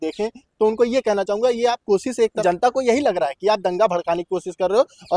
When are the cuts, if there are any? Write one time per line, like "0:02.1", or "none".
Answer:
0:02.4